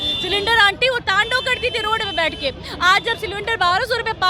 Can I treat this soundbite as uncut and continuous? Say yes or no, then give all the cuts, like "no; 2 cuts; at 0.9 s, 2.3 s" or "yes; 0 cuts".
yes; 0 cuts